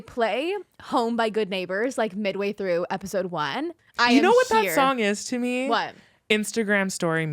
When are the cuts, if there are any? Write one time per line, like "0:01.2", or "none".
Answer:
0:03.7